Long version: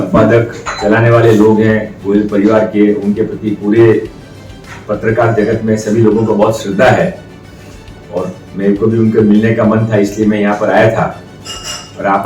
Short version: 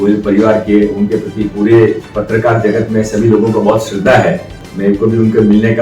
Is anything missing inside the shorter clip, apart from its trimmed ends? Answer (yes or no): yes